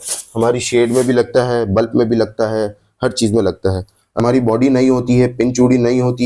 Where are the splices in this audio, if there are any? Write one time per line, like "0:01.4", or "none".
0:04.2